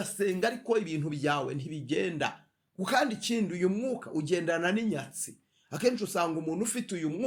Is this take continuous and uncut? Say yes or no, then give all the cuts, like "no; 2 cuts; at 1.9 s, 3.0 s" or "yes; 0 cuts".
yes; 0 cuts